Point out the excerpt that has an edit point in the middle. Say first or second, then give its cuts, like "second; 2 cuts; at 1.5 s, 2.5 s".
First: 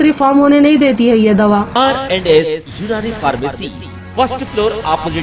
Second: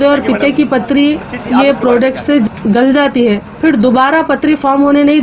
first; 1 cut; at 1.7 s